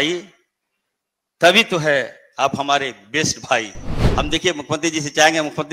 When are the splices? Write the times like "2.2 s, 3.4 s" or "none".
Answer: 3.9 s